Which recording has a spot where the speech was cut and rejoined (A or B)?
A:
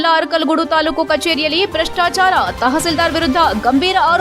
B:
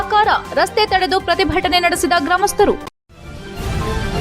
B